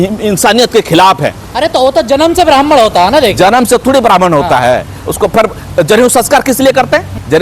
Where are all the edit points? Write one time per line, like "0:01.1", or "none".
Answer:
none